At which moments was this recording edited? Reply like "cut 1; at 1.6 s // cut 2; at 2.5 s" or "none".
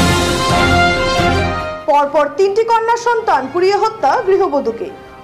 cut 1; at 1.3 s